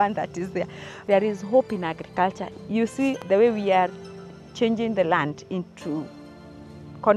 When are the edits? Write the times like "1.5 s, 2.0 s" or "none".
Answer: 1.0 s, 2.8 s